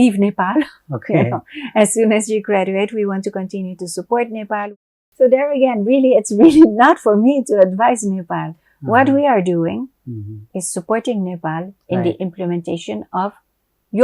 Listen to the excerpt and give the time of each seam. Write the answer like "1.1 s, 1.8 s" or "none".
4.7 s